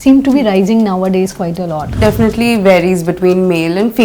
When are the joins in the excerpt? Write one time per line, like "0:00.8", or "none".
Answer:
0:02.0